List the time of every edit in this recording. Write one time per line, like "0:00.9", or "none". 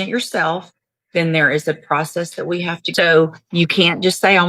0:02.8